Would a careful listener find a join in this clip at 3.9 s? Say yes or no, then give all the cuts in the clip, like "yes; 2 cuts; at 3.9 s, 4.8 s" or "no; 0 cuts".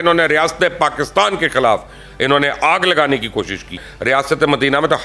yes; 1 cut; at 3.9 s